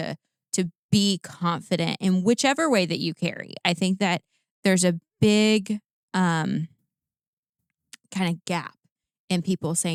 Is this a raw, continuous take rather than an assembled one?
yes; 0 cuts

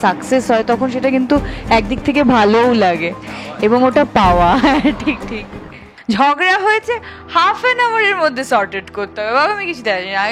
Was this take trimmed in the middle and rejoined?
yes; 1 cut; at 5.9 s

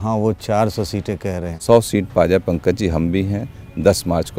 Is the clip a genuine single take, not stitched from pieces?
yes; 0 cuts

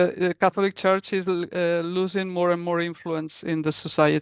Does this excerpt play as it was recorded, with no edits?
yes; 0 cuts

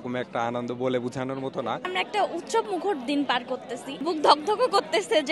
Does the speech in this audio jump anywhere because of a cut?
yes; 2 cuts; at 1.9 s, 4.0 s

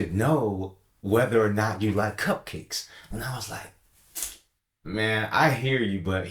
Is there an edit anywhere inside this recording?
no; 0 cuts

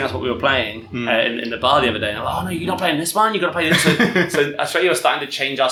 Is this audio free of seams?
yes; 0 cuts

